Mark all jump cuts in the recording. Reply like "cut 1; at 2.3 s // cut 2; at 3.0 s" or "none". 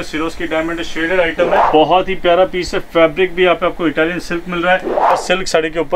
cut 1; at 1.6 s // cut 2; at 5.2 s